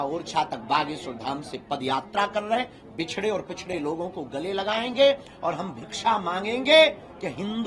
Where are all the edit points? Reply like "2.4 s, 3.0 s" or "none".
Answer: none